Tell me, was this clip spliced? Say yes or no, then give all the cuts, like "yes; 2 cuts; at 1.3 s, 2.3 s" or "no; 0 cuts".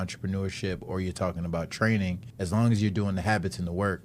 yes; 1 cut; at 2.3 s